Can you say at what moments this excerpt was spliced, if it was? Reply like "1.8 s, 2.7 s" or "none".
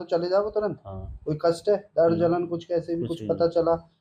none